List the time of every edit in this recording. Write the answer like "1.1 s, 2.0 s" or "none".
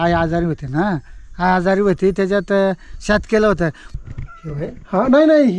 3.8 s